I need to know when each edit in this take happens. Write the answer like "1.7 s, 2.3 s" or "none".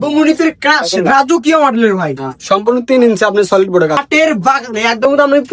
4.0 s